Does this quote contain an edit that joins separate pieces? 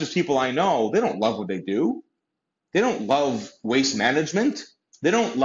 no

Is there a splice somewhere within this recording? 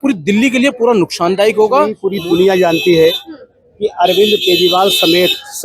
yes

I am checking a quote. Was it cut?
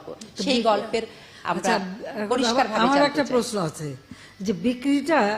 no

